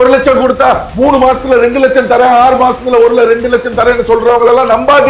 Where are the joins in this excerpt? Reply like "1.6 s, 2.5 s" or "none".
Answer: none